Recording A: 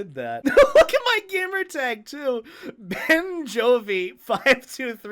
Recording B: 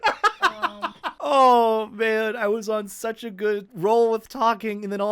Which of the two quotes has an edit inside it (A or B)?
B